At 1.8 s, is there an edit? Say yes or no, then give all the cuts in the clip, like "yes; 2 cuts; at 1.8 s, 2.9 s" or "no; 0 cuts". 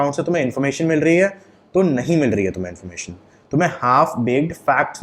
no; 0 cuts